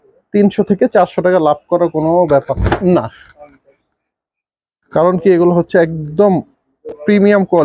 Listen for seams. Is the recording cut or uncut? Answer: uncut